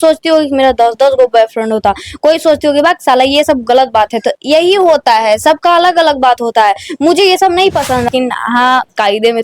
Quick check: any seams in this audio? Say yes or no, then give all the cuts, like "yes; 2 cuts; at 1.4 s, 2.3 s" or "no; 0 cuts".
yes; 1 cut; at 8.1 s